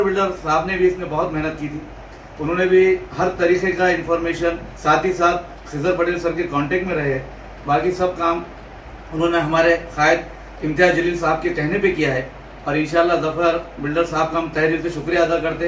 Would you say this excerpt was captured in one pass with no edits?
no; 1 cut; at 4.7 s

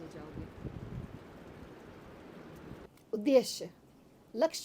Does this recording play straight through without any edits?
no; 1 cut; at 2.8 s

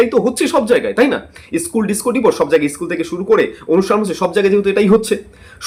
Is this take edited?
no; 0 cuts

